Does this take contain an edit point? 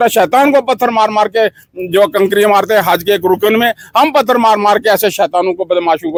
no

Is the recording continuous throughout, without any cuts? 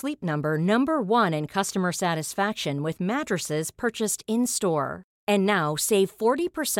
yes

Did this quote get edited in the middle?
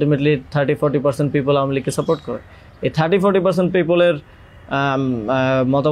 no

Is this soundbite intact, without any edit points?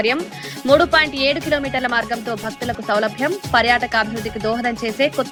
yes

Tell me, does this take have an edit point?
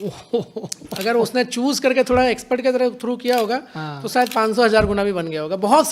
no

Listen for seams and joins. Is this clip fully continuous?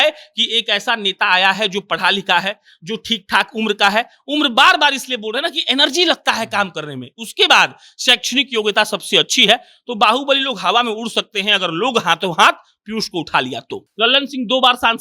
no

